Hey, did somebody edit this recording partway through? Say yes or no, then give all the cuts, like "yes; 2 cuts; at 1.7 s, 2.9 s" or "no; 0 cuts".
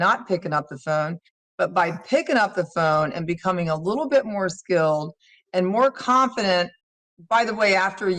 no; 0 cuts